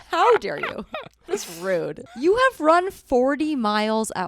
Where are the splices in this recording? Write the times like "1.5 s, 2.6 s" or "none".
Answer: 2.0 s